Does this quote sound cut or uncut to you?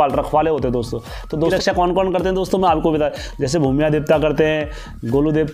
cut